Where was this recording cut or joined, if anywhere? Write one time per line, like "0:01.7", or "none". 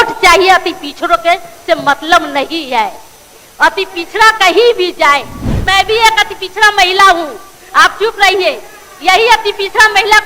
0:05.6